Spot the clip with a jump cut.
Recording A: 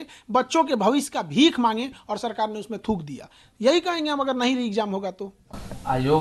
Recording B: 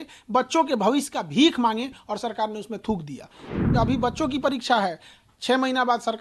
B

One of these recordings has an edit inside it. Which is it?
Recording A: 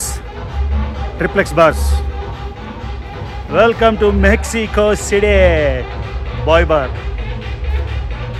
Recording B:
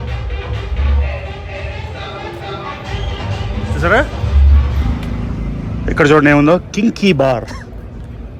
B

